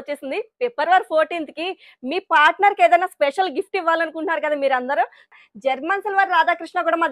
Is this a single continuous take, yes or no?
no